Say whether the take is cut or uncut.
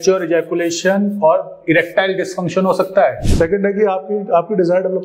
cut